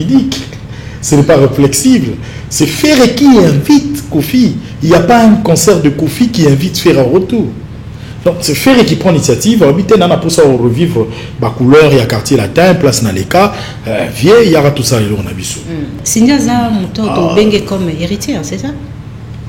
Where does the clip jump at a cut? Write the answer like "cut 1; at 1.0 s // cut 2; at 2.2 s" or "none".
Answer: cut 1; at 16.0 s